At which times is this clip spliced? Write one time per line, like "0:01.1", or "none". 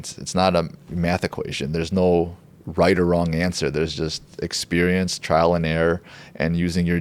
none